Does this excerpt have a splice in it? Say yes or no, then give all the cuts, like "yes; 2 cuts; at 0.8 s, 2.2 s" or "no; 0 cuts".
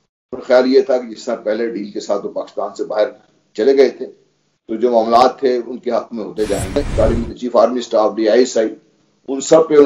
yes; 1 cut; at 6.7 s